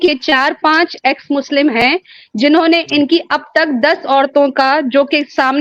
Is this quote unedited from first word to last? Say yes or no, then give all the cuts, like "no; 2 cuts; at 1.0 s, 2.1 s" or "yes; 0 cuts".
yes; 0 cuts